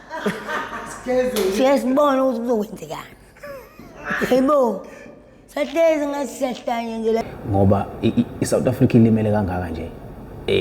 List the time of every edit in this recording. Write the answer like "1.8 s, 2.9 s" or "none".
7.2 s